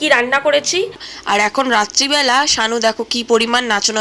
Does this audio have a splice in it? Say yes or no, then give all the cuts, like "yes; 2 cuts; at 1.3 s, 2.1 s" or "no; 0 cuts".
yes; 1 cut; at 1.0 s